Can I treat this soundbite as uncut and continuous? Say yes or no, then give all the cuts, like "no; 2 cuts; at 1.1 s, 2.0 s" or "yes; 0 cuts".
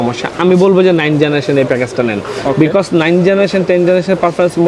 yes; 0 cuts